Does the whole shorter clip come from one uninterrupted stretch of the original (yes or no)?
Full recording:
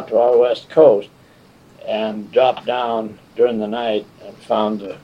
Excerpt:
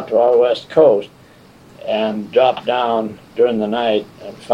yes